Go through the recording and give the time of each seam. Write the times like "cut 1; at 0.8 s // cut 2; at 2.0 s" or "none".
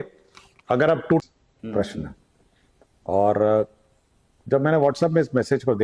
cut 1; at 1.2 s